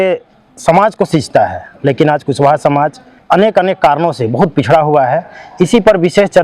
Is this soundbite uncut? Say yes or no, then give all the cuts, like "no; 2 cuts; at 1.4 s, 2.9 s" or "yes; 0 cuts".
yes; 0 cuts